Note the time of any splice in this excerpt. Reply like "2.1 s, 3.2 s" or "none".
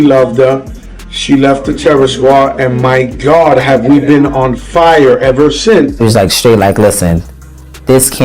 5.9 s